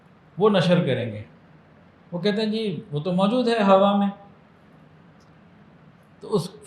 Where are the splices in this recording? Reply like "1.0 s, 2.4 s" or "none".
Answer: none